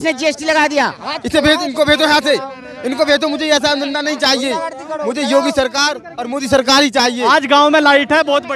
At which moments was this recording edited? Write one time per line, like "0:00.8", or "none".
0:01.1
0:07.3